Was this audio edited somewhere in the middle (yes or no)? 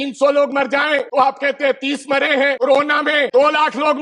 yes